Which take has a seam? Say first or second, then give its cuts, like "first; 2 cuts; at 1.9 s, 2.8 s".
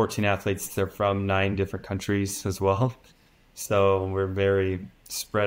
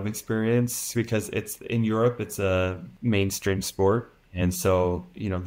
second; 2 cuts; at 2.9 s, 4.2 s